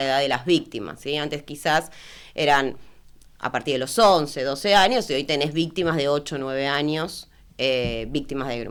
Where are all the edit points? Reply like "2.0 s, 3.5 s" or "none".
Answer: none